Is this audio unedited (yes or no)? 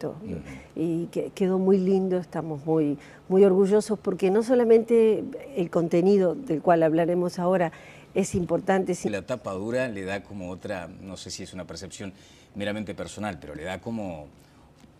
yes